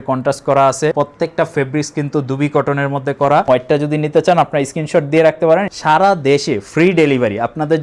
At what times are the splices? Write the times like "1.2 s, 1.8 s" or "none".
0.9 s, 3.4 s, 5.7 s